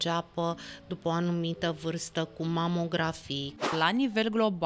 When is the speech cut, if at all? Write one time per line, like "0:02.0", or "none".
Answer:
0:03.7